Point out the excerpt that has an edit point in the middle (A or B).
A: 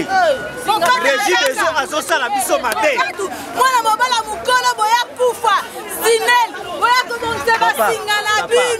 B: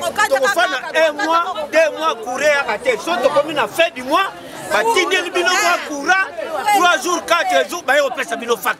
A